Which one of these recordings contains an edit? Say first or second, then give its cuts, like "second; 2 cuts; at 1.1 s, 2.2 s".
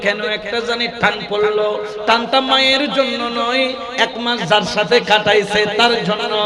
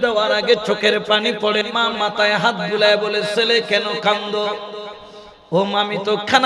second; 1 cut; at 1.6 s